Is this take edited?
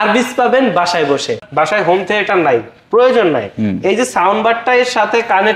yes; 1 cut; at 1.4 s

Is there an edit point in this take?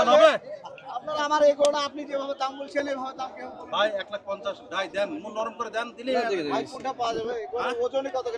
no; 0 cuts

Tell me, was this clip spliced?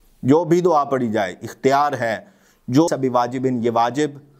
yes; 1 cut; at 2.9 s

